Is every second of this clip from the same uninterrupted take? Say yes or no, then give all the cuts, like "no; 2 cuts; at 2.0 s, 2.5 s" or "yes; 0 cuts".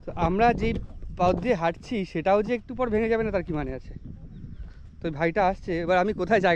yes; 0 cuts